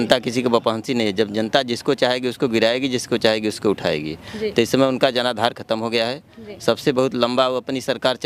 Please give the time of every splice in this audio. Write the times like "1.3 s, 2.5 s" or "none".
none